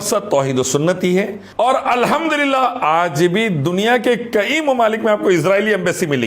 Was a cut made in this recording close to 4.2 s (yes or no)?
no